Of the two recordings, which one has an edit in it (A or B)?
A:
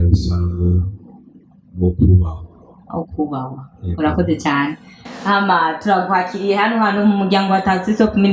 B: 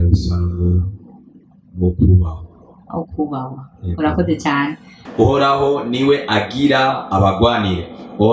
B